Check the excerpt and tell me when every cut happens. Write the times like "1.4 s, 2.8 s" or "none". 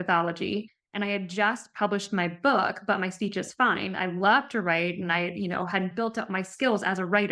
5.9 s